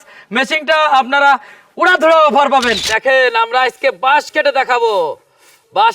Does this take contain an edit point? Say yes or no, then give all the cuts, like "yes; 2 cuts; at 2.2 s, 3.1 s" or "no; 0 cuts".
yes; 1 cut; at 2.9 s